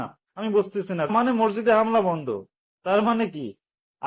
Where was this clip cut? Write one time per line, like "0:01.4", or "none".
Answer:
0:01.1